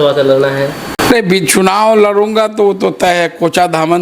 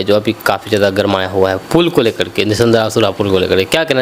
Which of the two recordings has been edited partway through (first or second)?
first